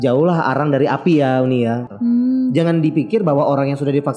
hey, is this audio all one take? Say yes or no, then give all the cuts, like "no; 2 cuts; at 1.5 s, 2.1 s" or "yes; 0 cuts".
no; 1 cut; at 1.9 s